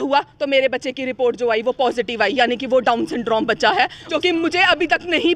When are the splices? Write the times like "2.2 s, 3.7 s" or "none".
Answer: 4.0 s